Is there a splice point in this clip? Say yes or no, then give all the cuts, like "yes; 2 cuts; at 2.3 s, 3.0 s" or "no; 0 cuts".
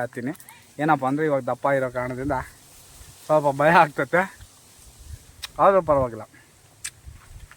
no; 0 cuts